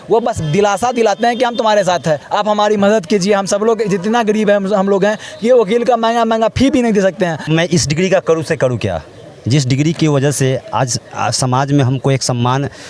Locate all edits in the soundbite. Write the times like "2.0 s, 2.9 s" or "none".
2.3 s, 7.4 s